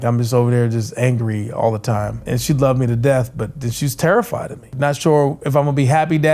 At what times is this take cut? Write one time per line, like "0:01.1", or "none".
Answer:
0:02.2
0:04.7